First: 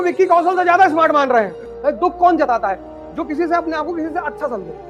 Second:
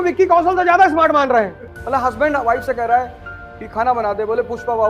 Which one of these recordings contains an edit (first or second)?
second